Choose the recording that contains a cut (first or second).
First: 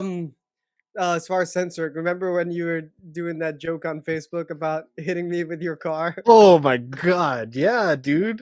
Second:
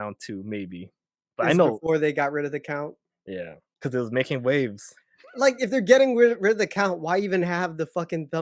second